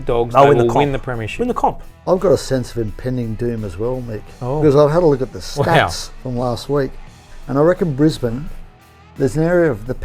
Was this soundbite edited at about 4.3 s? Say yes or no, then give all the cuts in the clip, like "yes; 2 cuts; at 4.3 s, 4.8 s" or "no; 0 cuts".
no; 1 cut; at 1.9 s